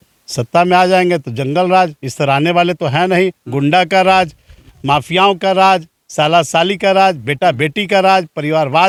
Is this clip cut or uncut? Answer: uncut